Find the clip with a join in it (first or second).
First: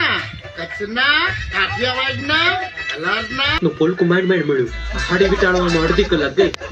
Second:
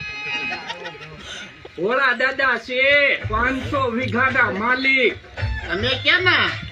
first